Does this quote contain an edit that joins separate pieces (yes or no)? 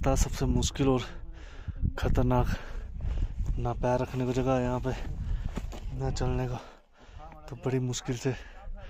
no